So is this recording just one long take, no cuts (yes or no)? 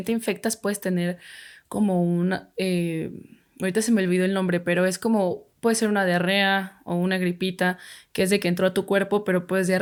yes